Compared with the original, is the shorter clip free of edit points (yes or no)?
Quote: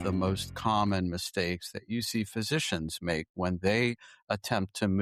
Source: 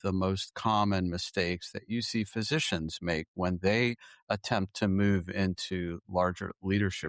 yes